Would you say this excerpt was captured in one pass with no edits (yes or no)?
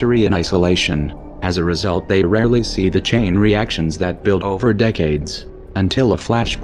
no